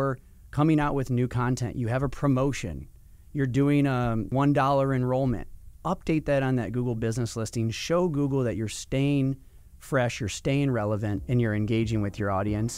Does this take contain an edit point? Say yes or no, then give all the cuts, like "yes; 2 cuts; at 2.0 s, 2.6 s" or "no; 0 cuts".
yes; 2 cuts; at 4.3 s, 11.2 s